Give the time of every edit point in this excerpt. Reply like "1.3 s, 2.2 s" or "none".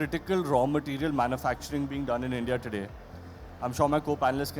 none